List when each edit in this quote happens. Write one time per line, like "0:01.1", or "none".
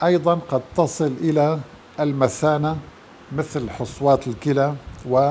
none